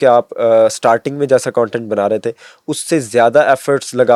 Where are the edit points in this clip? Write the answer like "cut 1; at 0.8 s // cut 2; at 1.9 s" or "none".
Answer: none